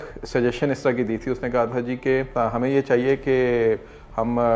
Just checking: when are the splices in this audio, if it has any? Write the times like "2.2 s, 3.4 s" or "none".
2.3 s